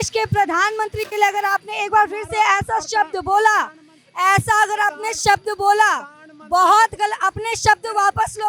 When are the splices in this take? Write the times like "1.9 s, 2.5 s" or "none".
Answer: none